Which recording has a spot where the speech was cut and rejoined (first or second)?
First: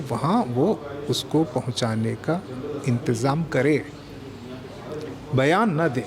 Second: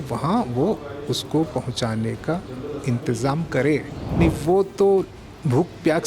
second